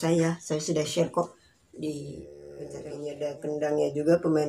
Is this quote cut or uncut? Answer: cut